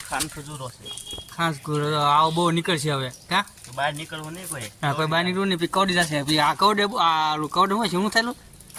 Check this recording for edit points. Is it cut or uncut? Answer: uncut